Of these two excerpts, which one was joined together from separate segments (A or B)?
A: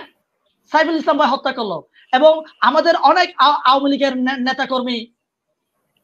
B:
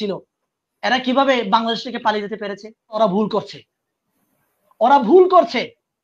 B